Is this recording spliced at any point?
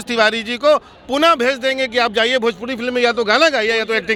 no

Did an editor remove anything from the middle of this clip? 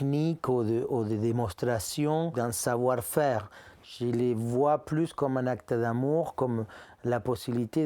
yes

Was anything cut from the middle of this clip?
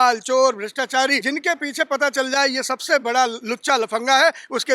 yes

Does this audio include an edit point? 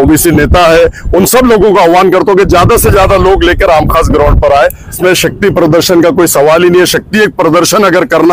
yes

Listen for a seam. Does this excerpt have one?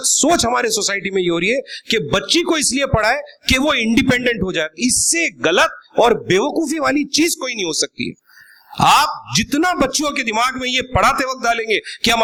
no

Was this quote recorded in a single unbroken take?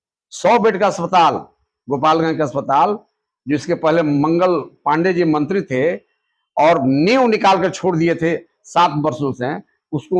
yes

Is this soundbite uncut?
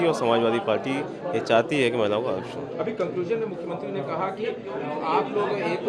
yes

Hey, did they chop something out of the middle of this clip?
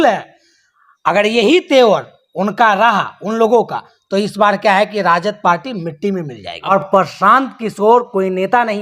yes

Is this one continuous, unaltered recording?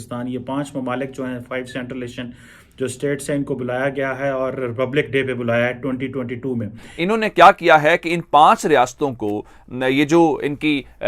no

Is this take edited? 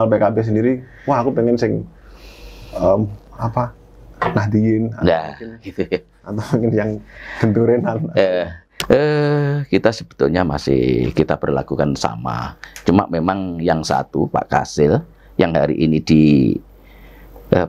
yes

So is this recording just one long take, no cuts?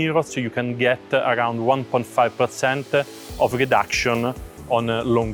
yes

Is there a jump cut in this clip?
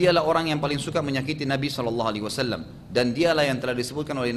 no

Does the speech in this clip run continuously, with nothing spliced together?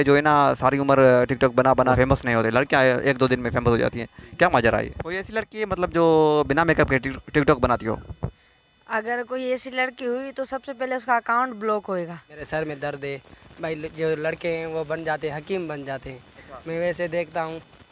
no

